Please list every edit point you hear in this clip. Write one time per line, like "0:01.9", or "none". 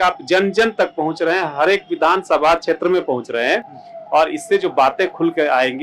none

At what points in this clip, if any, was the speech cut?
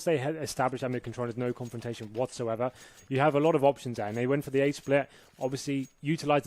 0:01.1

